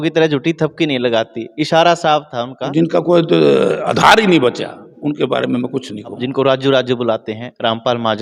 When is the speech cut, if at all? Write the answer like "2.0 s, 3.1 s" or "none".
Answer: 2.7 s, 6.2 s